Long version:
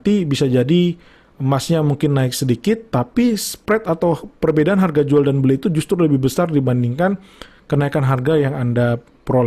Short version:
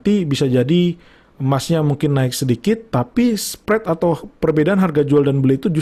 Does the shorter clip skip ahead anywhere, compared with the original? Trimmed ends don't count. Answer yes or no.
no